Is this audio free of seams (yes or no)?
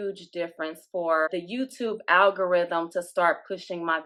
yes